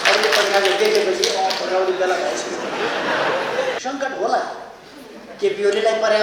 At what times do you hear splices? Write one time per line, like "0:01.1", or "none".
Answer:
0:03.8